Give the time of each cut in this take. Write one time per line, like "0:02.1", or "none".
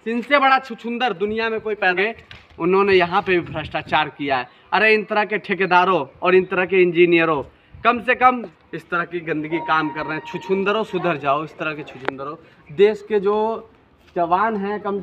0:01.9
0:08.5